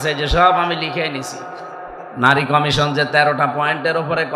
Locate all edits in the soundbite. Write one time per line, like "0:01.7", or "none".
0:02.0